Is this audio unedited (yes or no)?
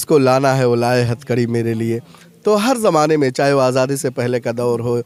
yes